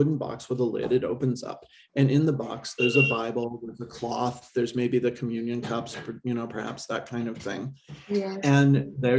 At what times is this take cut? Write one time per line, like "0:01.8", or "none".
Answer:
none